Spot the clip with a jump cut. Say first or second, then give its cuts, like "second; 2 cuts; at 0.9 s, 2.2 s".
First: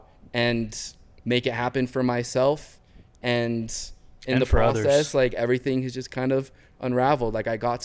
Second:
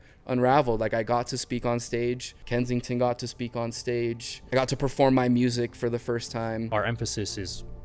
second; 3 cuts; at 2.3 s, 4.3 s, 6.7 s